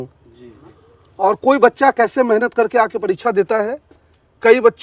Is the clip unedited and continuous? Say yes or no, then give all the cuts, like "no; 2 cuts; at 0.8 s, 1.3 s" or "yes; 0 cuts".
yes; 0 cuts